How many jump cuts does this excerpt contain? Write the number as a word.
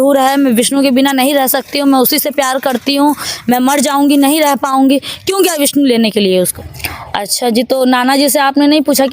one